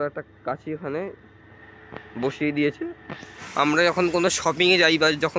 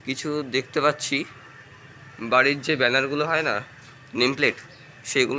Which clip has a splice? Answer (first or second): first